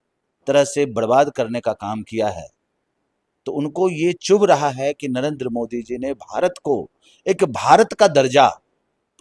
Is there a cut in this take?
no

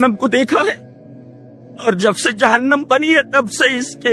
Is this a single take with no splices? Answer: yes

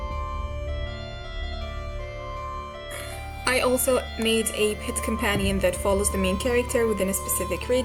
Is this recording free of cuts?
yes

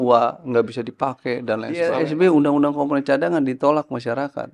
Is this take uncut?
no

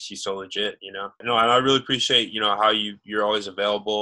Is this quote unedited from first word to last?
no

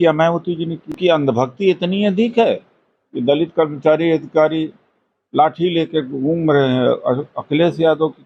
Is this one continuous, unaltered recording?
no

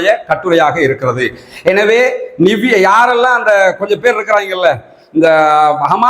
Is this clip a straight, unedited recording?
yes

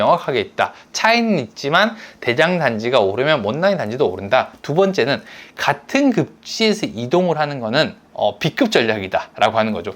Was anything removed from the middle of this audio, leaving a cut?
yes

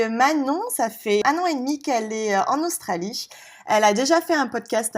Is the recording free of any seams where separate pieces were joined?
no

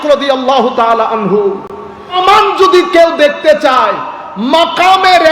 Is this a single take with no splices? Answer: no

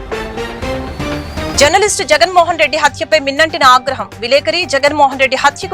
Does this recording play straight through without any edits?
no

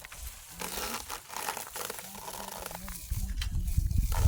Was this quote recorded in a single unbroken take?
yes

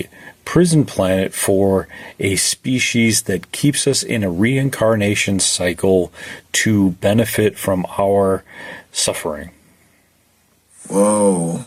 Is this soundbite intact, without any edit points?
yes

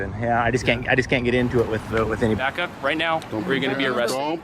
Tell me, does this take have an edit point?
yes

